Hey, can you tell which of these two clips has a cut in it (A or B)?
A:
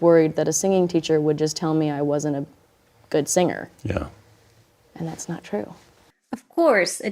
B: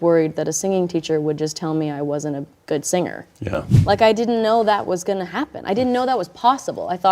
B